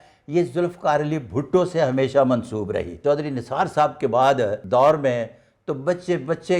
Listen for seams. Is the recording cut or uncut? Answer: cut